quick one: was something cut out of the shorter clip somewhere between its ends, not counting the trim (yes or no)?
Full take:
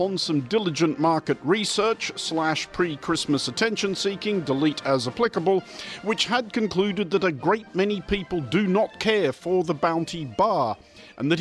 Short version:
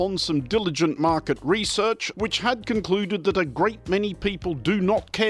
yes